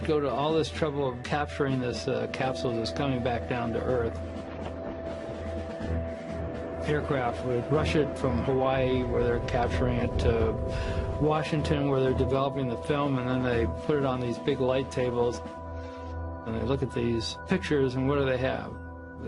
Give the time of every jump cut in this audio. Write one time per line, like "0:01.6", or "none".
0:05.7